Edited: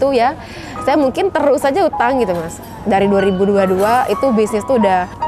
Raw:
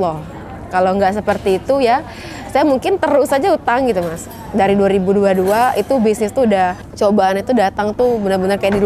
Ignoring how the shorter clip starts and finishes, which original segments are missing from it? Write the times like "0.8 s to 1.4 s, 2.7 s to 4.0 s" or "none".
none